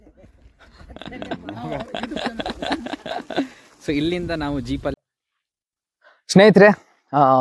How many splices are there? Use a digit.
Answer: 1